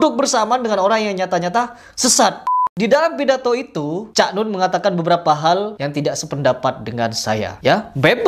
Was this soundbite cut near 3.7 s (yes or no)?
no